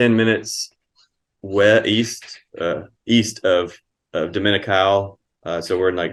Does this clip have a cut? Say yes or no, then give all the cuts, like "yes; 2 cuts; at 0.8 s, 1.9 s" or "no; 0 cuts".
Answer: no; 0 cuts